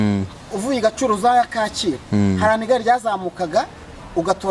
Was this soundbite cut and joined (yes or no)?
no